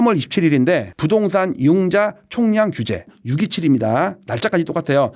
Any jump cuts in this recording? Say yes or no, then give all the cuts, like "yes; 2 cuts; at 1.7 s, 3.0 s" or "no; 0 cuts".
no; 0 cuts